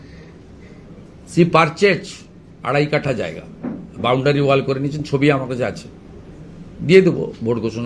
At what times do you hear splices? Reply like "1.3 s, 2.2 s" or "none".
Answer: none